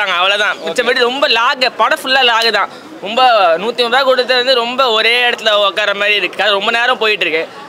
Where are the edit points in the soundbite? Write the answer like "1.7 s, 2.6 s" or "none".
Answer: none